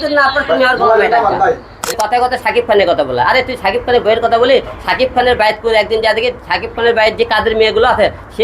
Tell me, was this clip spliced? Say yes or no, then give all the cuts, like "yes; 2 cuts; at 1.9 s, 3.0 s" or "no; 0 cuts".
yes; 1 cut; at 1.8 s